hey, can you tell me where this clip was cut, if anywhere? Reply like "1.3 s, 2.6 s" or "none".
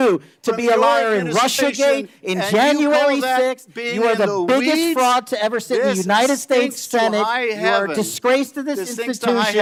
none